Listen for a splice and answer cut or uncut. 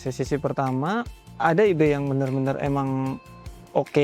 cut